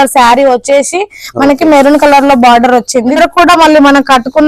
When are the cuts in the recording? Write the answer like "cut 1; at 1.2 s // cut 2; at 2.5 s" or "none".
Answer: cut 1; at 3.2 s